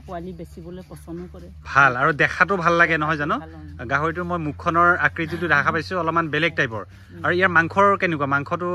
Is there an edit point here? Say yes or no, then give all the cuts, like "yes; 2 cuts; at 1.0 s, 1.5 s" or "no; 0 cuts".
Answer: no; 0 cuts